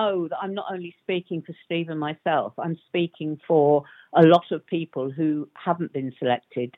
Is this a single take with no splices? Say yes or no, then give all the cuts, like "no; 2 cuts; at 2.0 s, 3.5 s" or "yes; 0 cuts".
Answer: yes; 0 cuts